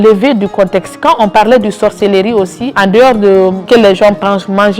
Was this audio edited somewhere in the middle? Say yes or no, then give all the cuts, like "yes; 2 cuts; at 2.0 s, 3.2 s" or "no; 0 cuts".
yes; 2 cuts; at 2.6 s, 3.6 s